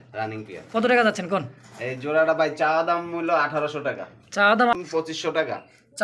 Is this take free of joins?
no; 1 cut; at 4.7 s

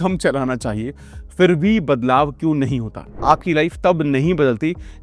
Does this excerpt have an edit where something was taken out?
yes; 1 cut; at 3.1 s

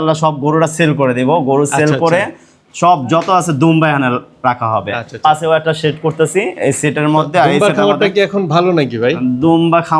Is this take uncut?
yes; 0 cuts

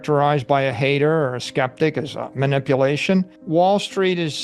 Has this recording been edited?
yes; 1 cut; at 3.4 s

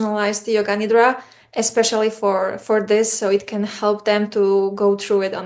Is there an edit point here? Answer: no; 0 cuts

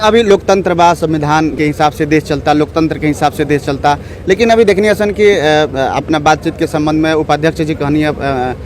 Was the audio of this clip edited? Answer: yes; 1 cut; at 1.5 s

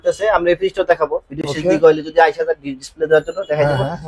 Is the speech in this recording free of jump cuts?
yes; 0 cuts

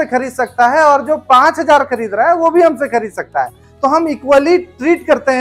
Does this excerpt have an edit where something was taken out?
no; 0 cuts

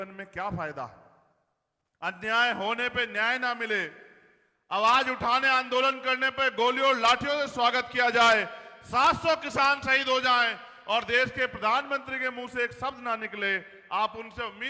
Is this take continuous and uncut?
yes; 0 cuts

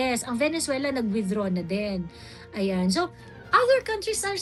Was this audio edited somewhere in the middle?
no; 0 cuts

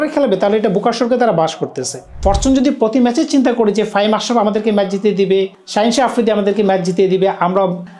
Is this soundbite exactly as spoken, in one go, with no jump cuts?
no; 1 cut; at 2.0 s

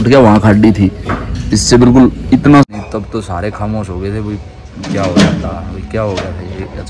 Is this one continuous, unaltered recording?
no; 1 cut; at 2.7 s

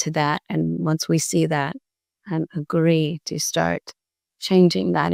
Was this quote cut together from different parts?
no; 0 cuts

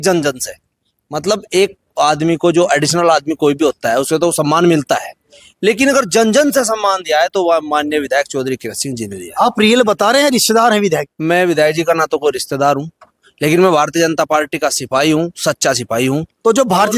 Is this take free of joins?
no; 1 cut; at 11.1 s

